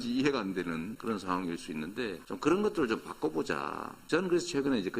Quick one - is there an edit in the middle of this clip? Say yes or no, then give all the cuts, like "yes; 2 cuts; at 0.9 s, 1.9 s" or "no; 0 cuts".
yes; 2 cuts; at 0.9 s, 4.0 s